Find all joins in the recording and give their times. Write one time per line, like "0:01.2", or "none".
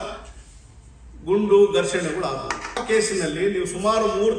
0:02.8

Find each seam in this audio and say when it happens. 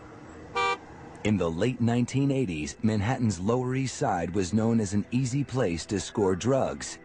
none

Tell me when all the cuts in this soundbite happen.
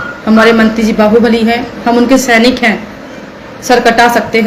0:01.7

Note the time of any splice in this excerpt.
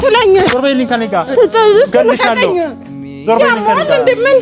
0:01.3

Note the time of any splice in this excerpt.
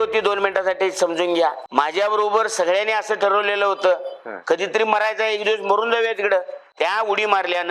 0:01.6
0:06.6

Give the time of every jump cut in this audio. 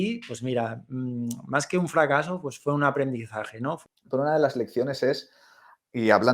0:03.7

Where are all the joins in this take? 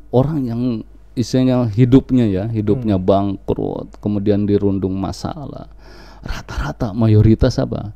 none

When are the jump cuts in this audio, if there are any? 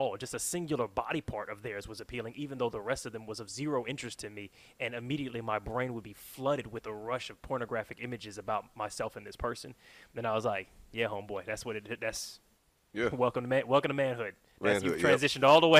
none

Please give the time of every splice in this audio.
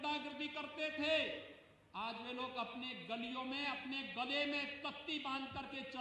none

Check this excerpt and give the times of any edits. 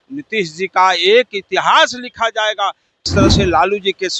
0:03.1

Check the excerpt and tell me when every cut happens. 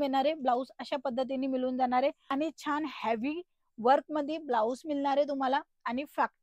0:02.3

